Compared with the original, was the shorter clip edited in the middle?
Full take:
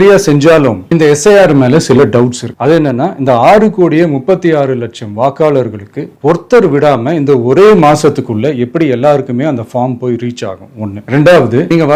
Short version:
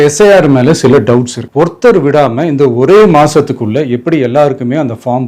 yes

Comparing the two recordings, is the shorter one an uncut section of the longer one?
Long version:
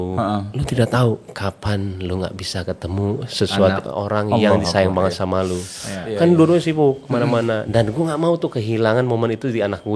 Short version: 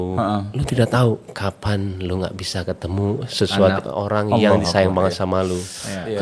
yes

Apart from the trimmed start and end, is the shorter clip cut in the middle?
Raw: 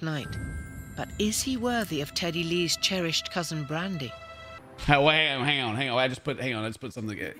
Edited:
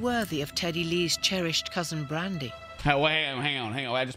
yes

